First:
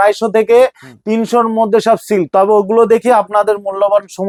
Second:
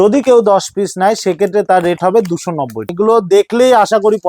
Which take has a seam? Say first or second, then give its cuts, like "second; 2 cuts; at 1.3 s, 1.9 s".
second; 1 cut; at 2.9 s